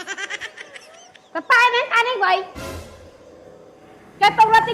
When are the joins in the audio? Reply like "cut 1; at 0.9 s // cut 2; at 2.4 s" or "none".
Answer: cut 1; at 1.1 s